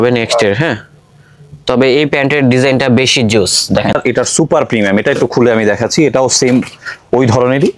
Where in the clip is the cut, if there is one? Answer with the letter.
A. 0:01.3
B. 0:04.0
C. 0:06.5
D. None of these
B